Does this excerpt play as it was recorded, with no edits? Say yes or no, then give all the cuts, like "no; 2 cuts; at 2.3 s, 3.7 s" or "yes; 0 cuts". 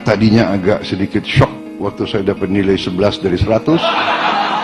yes; 0 cuts